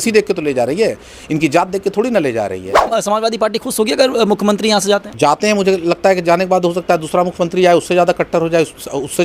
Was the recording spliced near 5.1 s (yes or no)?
yes